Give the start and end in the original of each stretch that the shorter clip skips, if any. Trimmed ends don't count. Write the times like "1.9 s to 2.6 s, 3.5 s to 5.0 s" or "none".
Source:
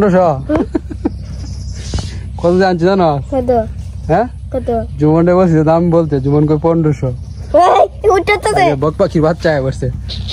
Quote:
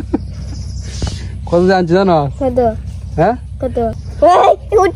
4.9 s to 7.3 s

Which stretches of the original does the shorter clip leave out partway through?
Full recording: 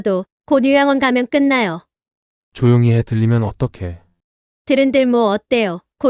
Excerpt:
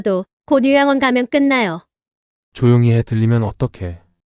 none

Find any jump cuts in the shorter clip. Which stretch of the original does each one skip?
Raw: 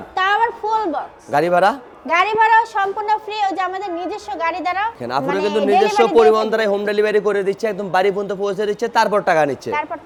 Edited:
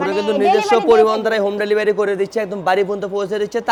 none

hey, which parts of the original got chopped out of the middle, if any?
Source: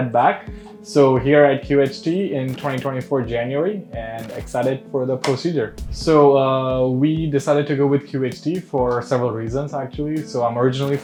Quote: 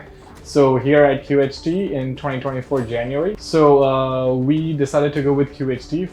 3.8 s to 6.0 s

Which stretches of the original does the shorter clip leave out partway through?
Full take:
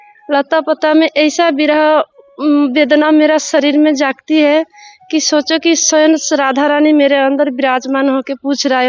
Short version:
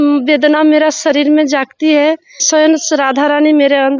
4.9 s to 5.8 s

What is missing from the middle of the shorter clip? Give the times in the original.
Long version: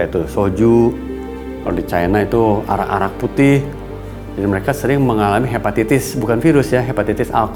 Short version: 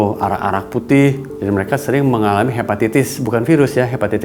3.8 s to 4.2 s

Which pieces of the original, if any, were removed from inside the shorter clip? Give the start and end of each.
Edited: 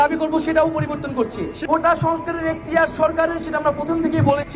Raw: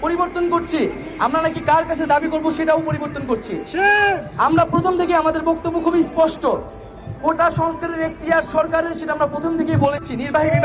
3.6 s to 7.0 s

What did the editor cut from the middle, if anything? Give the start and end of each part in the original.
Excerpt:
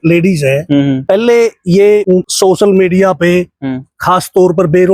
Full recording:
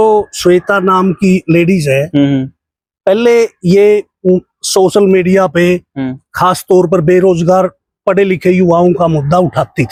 2.4 s to 3.0 s, 4.1 s to 4.5 s

